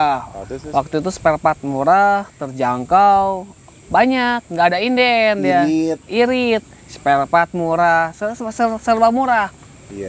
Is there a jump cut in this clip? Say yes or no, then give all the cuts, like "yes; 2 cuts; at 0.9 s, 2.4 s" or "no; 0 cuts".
no; 0 cuts